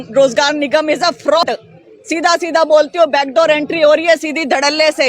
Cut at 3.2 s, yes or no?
no